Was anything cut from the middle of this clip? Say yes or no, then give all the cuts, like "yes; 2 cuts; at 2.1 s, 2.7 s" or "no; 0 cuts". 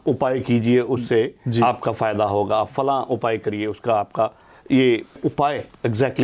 yes; 1 cut; at 5.2 s